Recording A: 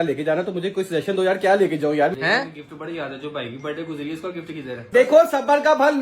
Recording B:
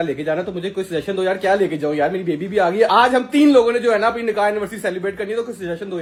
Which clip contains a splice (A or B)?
A